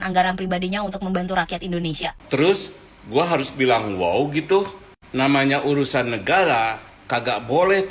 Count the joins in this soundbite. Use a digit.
1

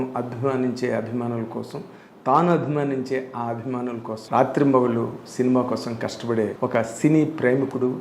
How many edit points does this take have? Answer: 2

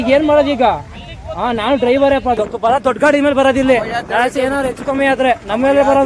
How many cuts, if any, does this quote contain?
1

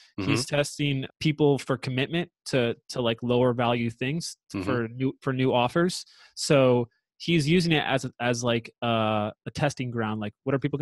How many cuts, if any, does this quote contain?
1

